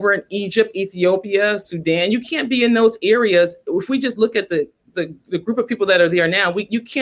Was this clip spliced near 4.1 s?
no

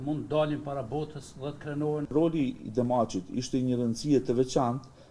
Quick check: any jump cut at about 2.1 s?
yes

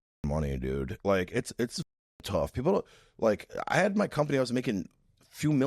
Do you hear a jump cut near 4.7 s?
no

